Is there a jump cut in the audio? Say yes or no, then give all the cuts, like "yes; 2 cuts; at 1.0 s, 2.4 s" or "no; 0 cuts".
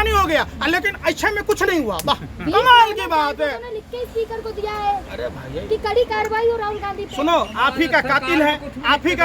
no; 0 cuts